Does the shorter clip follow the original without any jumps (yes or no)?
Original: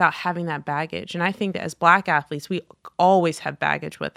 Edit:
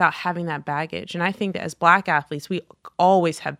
yes